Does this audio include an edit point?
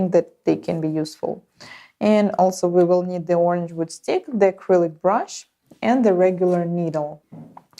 no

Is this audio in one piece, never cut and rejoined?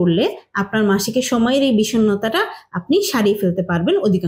yes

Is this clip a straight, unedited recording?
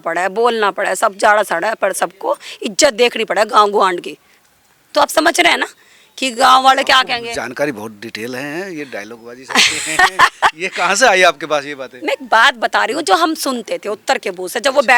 yes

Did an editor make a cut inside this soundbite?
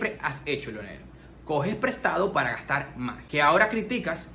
yes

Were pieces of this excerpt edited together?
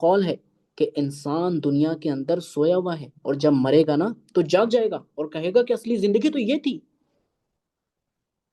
no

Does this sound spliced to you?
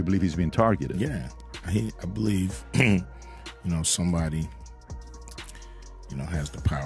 no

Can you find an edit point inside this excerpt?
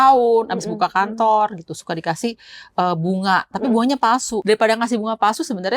yes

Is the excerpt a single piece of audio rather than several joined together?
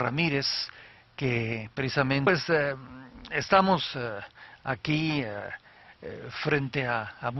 yes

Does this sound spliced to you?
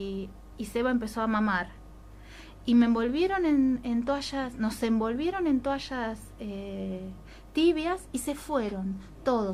yes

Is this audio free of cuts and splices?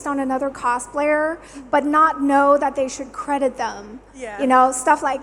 yes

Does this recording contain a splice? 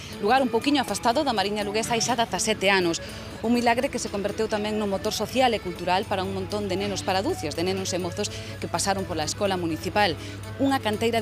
yes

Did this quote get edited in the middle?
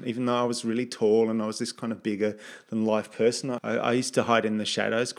yes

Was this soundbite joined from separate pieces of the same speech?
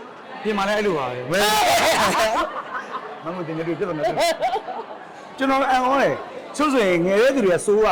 yes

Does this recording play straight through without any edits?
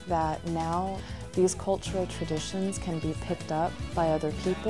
no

